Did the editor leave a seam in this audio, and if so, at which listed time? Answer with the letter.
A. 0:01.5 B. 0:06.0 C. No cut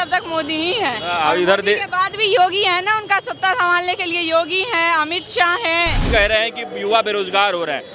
B